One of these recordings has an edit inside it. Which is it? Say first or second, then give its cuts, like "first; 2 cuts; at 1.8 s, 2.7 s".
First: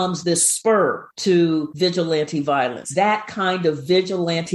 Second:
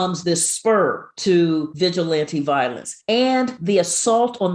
first; 1 cut; at 2.8 s